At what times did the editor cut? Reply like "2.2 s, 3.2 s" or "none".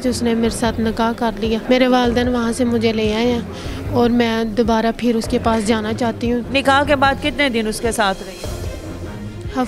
1.6 s, 6.5 s